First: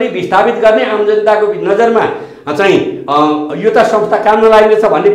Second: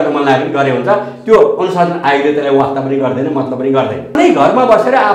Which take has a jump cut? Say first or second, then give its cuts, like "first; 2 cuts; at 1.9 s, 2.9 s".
second; 1 cut; at 4.1 s